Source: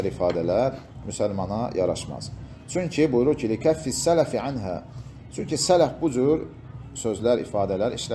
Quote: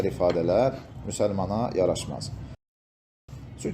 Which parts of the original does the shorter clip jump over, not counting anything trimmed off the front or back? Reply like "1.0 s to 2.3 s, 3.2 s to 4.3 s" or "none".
2.8 s to 4.5 s